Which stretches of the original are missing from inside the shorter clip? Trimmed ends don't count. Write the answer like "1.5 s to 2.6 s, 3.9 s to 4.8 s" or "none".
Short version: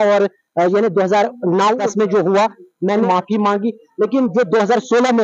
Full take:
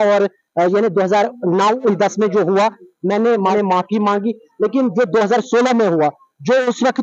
1.8 s to 2.0 s, 3.3 s to 3.7 s